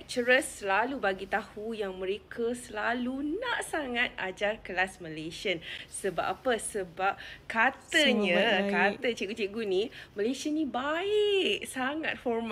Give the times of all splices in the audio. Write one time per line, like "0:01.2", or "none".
none